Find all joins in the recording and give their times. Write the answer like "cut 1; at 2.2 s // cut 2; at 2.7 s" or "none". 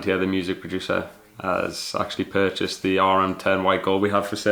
none